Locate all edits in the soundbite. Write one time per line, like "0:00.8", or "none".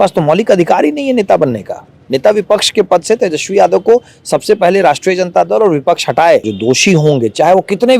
0:06.5